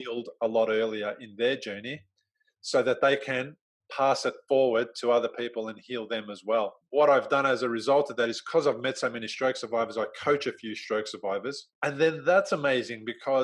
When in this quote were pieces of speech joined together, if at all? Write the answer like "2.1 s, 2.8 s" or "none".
6.8 s, 11.7 s